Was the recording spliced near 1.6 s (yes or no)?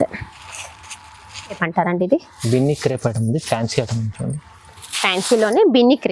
yes